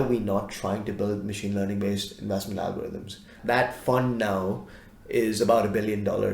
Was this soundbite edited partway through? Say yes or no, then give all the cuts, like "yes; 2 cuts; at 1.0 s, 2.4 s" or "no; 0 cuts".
yes; 1 cut; at 3.3 s